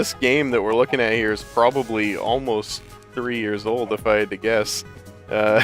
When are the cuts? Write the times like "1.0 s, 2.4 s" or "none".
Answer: none